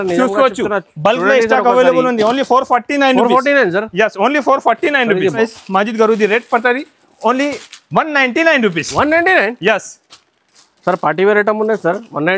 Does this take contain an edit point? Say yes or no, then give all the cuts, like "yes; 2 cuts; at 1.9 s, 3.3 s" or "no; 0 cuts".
yes; 1 cut; at 5.4 s